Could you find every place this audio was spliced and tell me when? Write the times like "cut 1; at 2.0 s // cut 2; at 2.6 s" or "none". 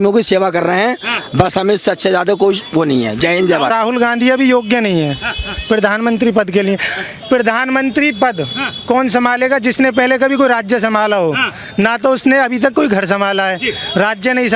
cut 1; at 3.7 s